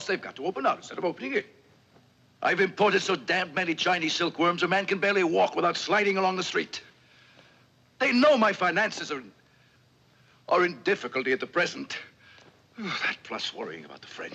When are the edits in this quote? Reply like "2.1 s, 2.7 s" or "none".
none